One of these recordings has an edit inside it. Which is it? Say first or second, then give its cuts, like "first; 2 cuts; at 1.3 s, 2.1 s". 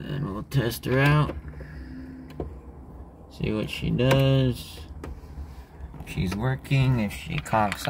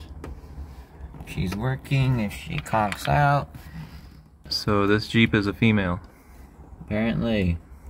second; 1 cut; at 4.4 s